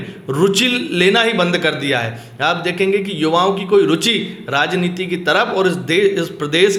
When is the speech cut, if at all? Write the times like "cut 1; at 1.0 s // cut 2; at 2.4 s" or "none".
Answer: none